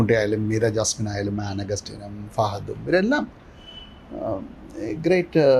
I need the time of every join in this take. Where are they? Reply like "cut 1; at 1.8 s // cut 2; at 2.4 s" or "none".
none